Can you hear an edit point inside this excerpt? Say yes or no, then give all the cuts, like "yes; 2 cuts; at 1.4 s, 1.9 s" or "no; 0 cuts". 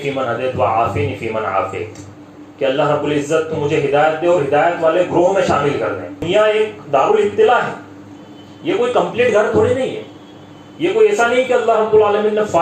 yes; 1 cut; at 6.3 s